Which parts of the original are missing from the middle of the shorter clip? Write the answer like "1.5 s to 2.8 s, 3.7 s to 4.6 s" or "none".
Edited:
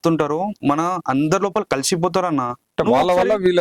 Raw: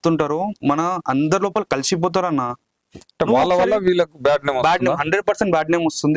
2.6 s to 3.0 s